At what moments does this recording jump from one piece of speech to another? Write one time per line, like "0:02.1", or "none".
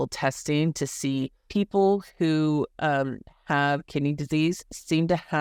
0:01.4